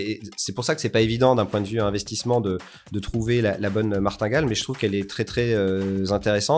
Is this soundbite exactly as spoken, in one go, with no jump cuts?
yes; 0 cuts

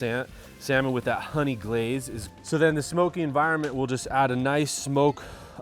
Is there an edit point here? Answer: yes; 1 cut; at 2.3 s

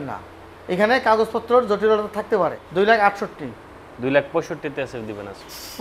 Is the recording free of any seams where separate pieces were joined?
no; 1 cut; at 2.6 s

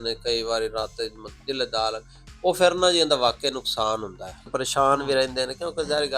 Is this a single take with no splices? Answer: no; 1 cut; at 4.5 s

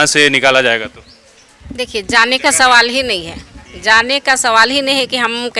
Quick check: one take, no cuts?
yes; 0 cuts

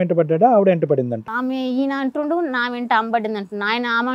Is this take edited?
yes; 1 cut; at 1.3 s

